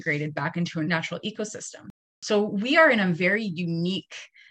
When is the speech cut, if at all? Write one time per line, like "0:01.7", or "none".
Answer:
0:00.9
0:02.1